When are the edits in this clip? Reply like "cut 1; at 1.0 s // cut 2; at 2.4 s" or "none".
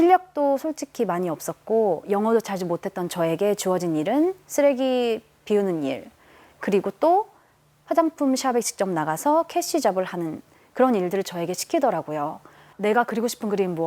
cut 1; at 12.7 s